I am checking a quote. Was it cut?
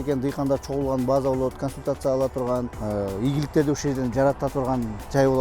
yes; 1 cut; at 2.8 s

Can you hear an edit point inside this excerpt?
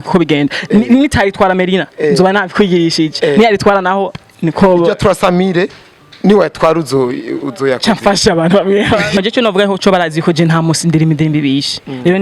yes; 1 cut; at 9.2 s

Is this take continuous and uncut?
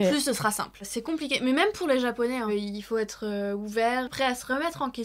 no; 3 cuts; at 0.9 s, 2.5 s, 4.1 s

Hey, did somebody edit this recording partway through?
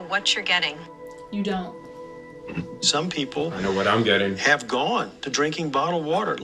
no; 0 cuts

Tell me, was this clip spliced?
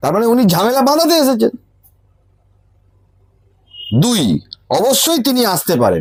no; 0 cuts

